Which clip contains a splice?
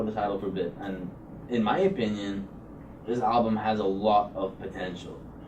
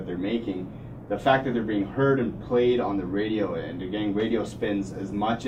first; 1 cut; at 3.3 s

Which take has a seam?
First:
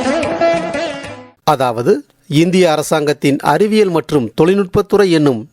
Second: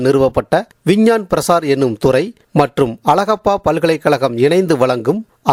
first; 1 cut; at 1.3 s

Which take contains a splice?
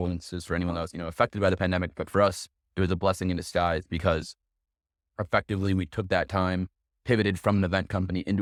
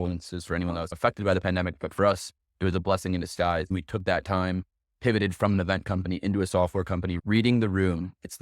second; 3 cuts; at 0.9 s, 3.7 s, 7.2 s

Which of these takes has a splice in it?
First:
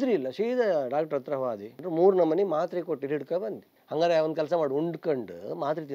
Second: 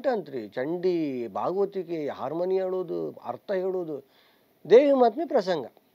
first; 2 cuts; at 1.8 s, 3.7 s

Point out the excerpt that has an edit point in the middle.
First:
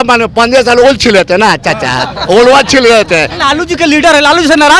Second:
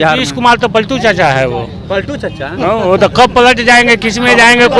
first; 1 cut; at 3.4 s

